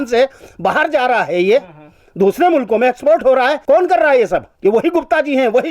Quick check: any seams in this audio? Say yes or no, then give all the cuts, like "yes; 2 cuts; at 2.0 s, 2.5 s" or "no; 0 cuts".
yes; 2 cuts; at 3.6 s, 4.5 s